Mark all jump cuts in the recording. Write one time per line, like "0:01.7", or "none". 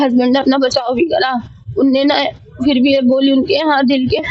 none